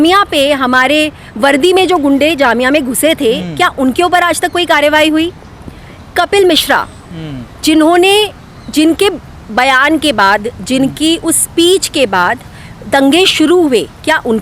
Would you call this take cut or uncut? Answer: uncut